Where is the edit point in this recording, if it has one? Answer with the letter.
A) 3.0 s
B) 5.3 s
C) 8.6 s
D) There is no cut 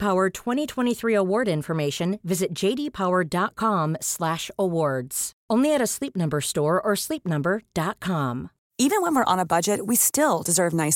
C